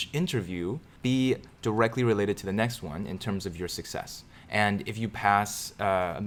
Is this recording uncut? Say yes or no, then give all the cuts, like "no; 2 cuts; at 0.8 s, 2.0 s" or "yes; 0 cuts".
yes; 0 cuts